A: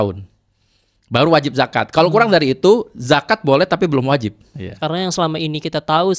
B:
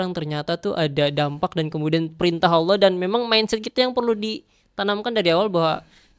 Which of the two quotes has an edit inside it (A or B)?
A